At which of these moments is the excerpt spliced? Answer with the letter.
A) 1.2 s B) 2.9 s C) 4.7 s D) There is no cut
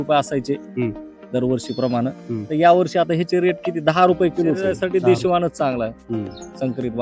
C